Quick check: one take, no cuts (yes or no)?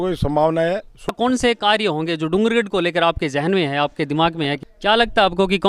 no